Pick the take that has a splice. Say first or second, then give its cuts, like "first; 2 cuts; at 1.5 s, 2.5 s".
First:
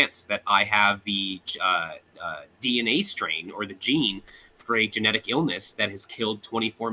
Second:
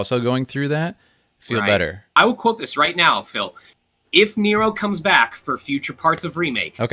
second; 1 cut; at 2.1 s